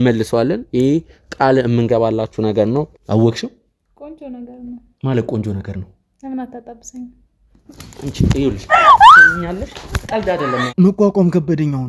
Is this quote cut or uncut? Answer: cut